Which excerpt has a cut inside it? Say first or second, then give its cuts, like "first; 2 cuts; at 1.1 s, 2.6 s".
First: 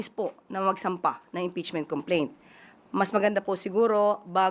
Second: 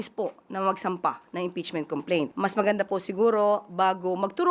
second; 1 cut; at 2.3 s